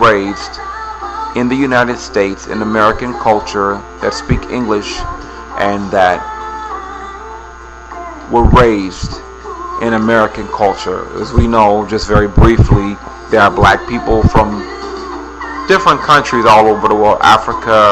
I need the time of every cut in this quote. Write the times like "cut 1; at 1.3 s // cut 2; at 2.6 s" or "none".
cut 1; at 1.0 s